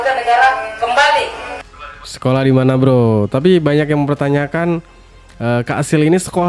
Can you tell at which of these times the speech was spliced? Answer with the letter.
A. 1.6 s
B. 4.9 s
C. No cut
A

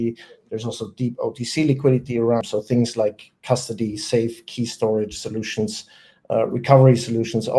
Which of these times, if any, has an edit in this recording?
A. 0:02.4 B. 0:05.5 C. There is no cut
A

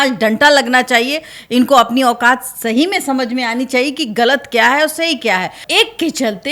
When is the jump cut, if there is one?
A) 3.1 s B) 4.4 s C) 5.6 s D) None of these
C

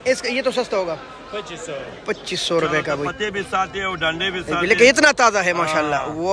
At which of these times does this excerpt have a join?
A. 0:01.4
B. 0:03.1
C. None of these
B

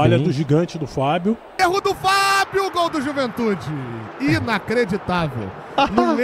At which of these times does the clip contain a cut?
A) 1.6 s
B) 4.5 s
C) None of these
A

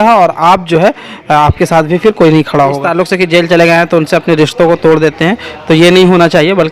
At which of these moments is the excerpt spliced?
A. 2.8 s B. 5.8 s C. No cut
A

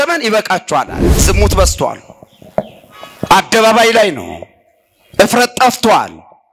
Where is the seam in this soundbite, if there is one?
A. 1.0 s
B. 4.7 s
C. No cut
A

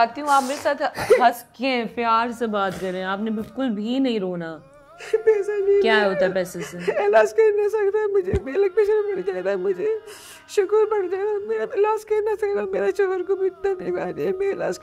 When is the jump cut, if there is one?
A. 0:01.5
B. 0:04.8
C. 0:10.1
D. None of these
D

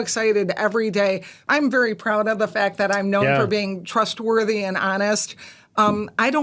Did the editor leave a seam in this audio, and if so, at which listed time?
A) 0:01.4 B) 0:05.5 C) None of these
A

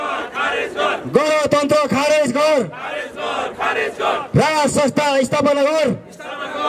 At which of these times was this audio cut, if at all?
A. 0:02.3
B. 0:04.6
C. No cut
C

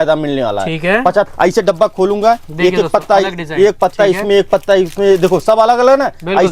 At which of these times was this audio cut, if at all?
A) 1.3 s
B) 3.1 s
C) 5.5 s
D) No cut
A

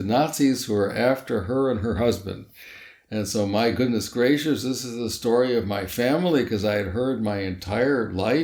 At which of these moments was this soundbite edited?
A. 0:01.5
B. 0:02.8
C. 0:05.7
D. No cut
D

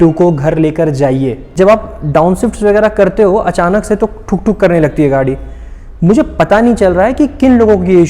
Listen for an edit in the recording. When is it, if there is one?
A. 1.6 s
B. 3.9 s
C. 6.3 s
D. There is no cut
A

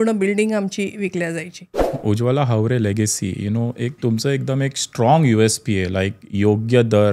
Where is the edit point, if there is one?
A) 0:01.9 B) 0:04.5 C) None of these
A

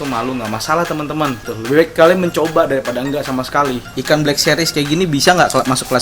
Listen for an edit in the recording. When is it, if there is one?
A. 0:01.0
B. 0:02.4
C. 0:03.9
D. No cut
C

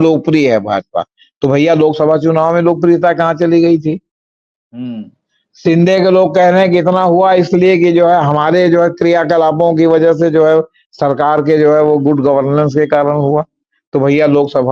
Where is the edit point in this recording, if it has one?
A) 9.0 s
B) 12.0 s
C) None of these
C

